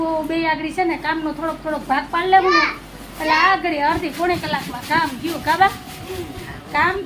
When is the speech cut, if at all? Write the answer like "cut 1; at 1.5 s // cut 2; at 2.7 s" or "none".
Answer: none